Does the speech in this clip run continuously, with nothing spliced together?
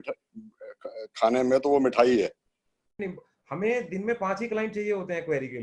no; 1 cut; at 3.0 s

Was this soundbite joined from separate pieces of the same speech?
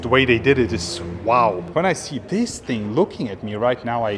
yes; 1 cut; at 1.6 s

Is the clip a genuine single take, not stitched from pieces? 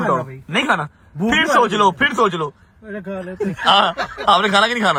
yes; 0 cuts

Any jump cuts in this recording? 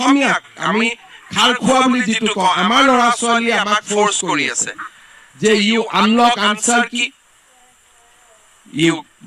no; 0 cuts

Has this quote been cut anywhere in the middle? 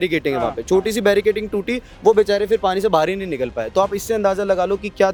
no; 0 cuts

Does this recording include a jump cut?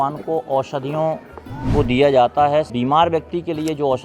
yes; 1 cut; at 2.7 s

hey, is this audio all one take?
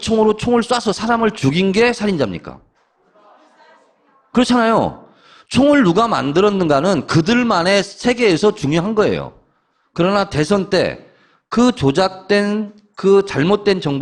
no; 1 cut; at 8.8 s

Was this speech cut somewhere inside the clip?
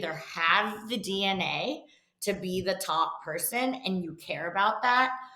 no; 0 cuts

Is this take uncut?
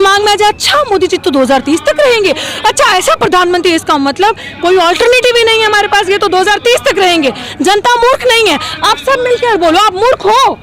yes; 0 cuts

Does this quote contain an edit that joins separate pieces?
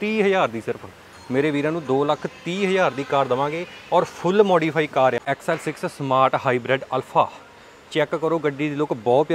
yes; 1 cut; at 5.2 s

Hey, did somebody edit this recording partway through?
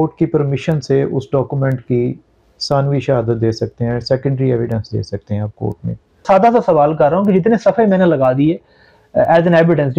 yes; 1 cut; at 6.2 s

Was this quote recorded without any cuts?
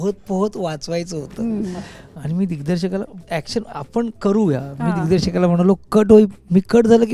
yes; 0 cuts

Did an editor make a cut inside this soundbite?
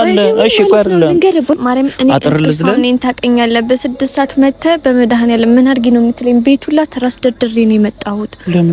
yes; 1 cut; at 1.5 s

